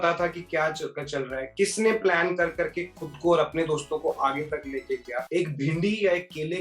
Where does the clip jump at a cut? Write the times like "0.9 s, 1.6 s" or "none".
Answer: 5.2 s